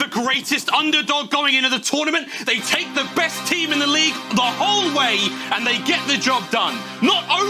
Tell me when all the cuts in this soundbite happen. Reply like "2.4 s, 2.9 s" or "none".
none